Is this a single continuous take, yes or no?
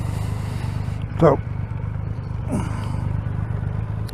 yes